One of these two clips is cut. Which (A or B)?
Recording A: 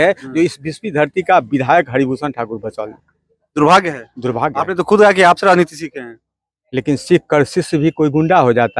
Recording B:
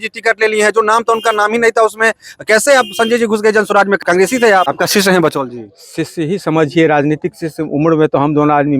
B